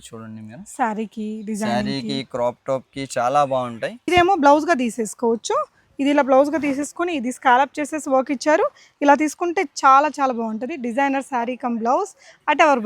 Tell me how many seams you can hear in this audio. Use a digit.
1